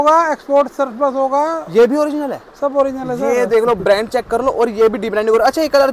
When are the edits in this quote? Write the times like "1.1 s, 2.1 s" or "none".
none